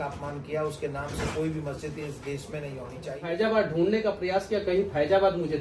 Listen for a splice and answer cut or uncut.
cut